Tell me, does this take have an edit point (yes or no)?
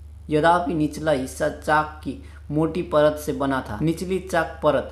yes